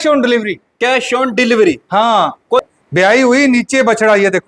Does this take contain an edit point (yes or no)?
yes